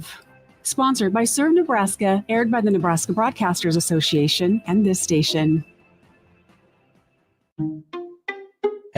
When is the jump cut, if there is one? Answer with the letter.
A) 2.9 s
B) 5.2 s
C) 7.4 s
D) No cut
C